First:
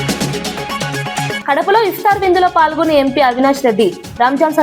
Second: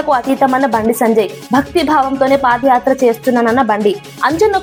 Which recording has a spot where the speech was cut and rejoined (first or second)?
first